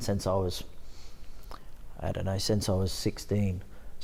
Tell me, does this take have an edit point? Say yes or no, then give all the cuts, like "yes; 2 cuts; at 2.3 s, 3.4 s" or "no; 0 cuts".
no; 0 cuts